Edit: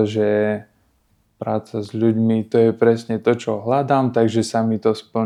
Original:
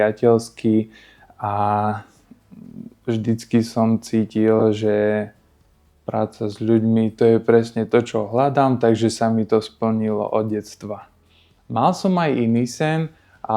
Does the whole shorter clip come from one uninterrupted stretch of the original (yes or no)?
yes